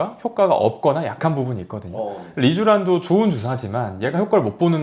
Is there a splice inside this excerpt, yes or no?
no